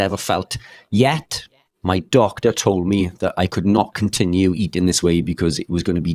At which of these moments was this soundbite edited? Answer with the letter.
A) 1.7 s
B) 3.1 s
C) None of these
C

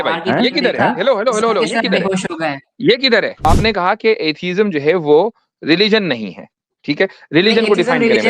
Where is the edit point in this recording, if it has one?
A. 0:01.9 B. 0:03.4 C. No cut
B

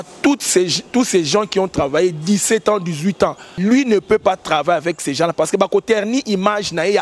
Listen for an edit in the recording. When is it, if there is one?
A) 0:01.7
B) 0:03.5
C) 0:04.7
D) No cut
B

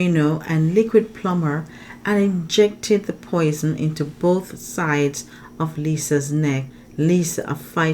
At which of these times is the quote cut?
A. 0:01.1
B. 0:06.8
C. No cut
B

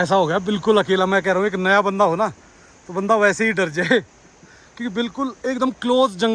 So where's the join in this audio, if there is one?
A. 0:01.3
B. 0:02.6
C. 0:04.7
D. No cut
D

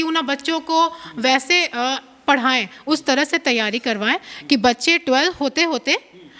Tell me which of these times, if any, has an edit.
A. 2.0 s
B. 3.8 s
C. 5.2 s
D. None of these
D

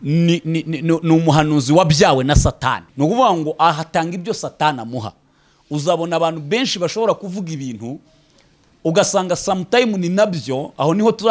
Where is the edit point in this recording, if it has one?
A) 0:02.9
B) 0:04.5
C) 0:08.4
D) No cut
A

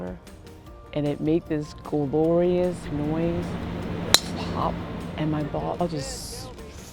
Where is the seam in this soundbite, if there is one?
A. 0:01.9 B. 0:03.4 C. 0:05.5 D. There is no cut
D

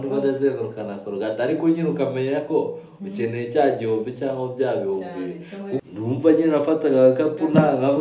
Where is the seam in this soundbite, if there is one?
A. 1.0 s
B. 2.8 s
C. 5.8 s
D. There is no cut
C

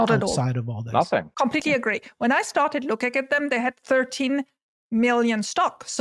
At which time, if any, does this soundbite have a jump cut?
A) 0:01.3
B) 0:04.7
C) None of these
A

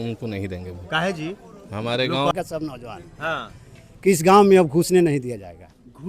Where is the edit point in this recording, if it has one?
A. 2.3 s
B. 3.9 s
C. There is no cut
A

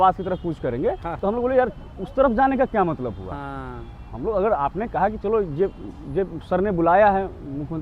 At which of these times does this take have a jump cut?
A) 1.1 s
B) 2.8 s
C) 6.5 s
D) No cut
A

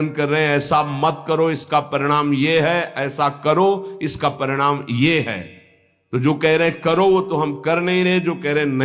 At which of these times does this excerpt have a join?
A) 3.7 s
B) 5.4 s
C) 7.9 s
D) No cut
D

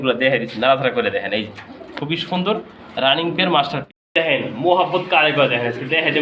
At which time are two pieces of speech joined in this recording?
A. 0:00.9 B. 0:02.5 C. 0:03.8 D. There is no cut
C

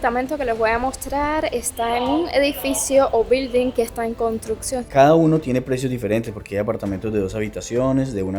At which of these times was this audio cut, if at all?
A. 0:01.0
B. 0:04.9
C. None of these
B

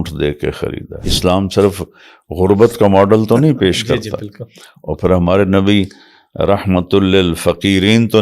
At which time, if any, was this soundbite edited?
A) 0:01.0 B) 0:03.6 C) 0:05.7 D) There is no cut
A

